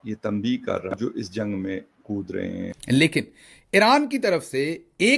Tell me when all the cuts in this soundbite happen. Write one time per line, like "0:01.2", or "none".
0:01.0
0:02.7